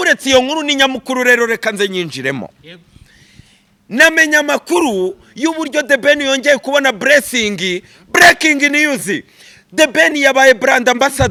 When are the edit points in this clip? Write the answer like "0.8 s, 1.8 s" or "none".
none